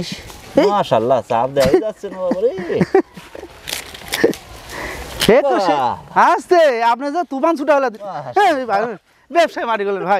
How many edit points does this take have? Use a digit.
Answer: 0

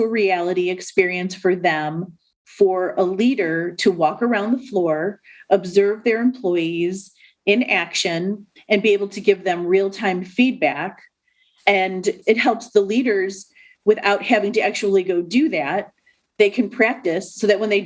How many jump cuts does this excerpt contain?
1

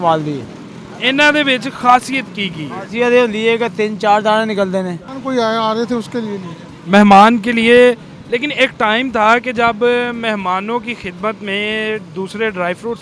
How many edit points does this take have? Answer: 1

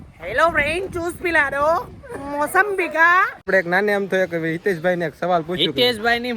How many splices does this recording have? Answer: 2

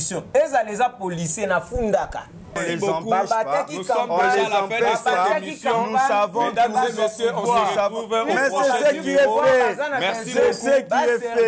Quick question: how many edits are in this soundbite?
1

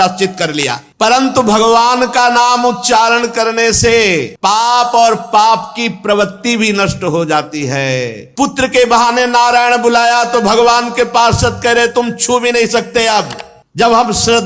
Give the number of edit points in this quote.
2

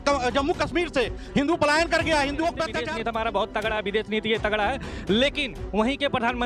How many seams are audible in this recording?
1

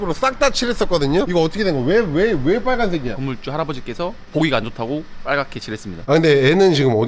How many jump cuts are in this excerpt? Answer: 3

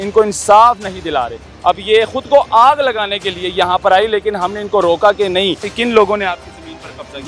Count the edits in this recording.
1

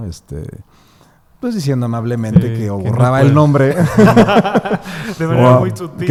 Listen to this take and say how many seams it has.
0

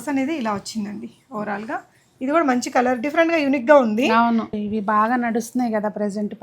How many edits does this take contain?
1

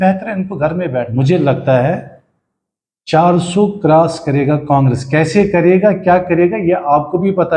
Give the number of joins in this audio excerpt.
1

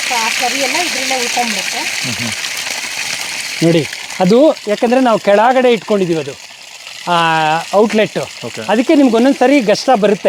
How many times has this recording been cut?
0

